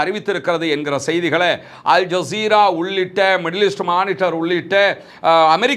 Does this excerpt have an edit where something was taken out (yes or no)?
no